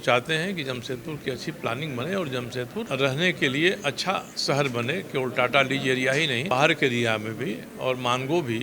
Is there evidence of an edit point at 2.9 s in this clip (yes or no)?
yes